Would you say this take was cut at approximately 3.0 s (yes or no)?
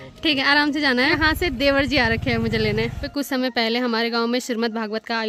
yes